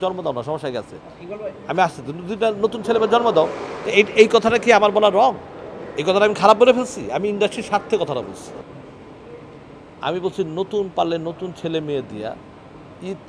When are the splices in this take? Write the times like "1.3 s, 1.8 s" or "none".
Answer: 8.6 s